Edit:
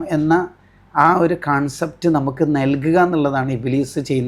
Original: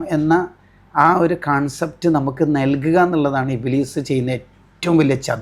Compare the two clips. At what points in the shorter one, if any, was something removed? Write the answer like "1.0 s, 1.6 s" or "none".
none